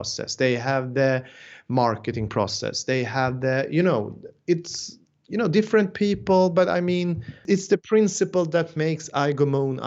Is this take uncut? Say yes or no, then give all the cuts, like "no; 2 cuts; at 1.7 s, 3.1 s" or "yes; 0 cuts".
no; 1 cut; at 7.3 s